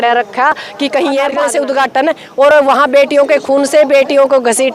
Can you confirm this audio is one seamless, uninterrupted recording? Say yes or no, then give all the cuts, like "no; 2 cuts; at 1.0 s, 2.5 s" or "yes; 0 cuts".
no; 1 cut; at 1.3 s